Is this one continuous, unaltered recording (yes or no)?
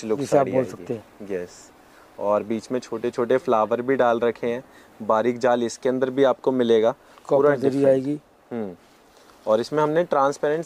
yes